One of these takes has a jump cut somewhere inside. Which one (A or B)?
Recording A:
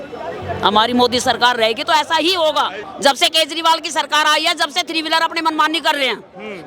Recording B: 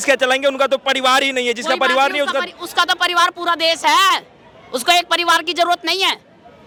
A